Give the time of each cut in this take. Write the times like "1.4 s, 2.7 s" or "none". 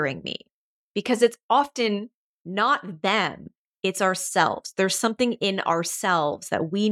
none